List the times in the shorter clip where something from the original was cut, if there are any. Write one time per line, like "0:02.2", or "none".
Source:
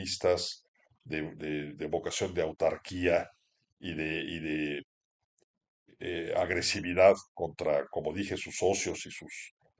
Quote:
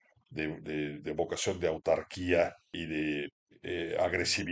0:02.8
0:03.5